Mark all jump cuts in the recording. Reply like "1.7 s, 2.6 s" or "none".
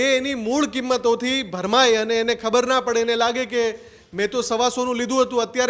none